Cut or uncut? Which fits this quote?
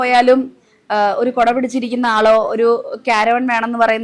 uncut